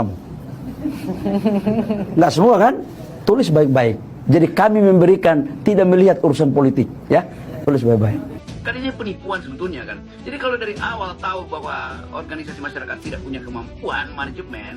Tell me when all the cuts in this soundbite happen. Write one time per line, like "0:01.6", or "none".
0:08.5